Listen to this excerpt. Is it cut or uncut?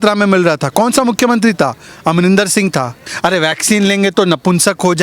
cut